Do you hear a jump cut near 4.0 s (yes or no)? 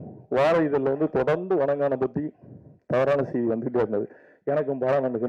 no